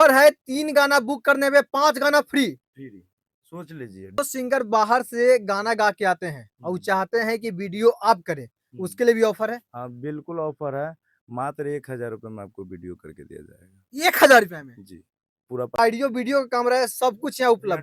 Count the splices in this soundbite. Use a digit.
2